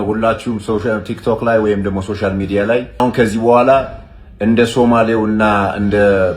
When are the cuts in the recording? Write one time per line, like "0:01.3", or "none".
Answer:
0:03.0